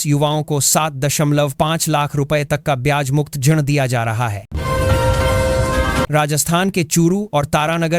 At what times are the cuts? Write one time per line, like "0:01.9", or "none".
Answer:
0:04.4
0:06.1